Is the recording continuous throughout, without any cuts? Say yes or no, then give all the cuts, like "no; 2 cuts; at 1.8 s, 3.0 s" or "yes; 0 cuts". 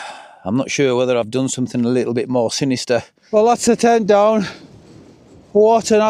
no; 1 cut; at 3.2 s